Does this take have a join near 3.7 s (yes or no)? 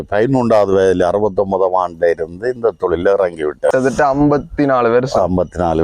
yes